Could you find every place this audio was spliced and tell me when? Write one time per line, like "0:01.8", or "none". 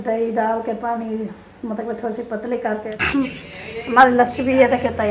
0:02.9